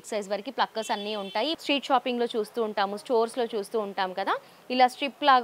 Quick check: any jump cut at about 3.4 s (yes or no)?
no